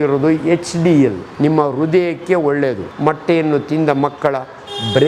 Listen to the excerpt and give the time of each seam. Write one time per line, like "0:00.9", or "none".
0:01.2
0:02.9